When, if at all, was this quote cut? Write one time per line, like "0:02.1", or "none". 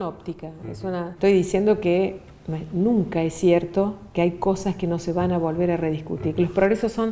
0:01.1